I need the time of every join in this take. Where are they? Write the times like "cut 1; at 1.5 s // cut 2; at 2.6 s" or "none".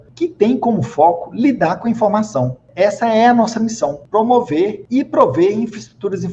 cut 1; at 2.6 s // cut 2; at 4.0 s // cut 3; at 4.8 s